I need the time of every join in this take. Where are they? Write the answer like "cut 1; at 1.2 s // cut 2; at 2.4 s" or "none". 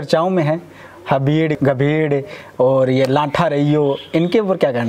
cut 1; at 1.6 s